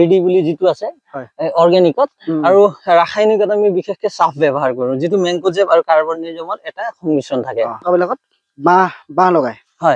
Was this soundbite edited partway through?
yes; 1 cut; at 7.8 s

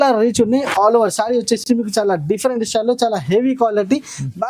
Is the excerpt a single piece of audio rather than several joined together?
yes; 0 cuts

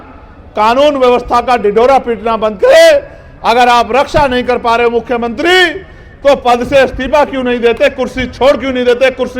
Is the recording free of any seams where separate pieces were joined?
yes; 0 cuts

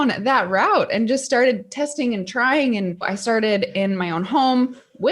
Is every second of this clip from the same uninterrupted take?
no; 1 cut; at 3.1 s

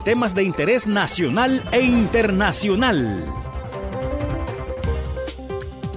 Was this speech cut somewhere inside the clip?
yes; 1 cut; at 5.1 s

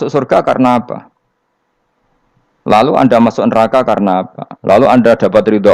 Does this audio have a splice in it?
no; 0 cuts

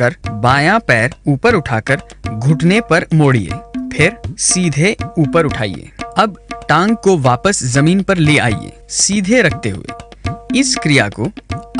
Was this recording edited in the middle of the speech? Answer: no; 0 cuts

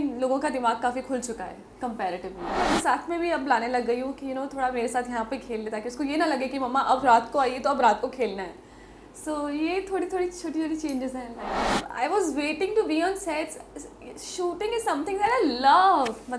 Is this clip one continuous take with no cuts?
no; 2 cuts; at 2.5 s, 11.8 s

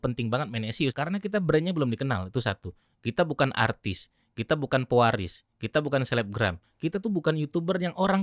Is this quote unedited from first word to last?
no; 2 cuts; at 0.9 s, 6.7 s

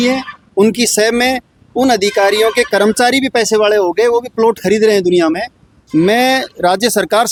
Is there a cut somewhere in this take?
no; 0 cuts

